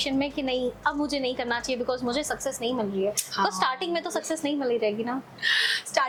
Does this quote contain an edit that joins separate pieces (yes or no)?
no